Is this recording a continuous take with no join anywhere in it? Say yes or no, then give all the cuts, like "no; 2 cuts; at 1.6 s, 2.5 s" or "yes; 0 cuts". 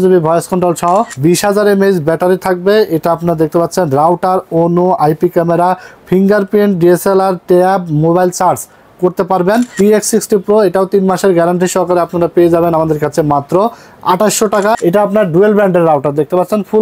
no; 3 cuts; at 1.1 s, 9.7 s, 14.8 s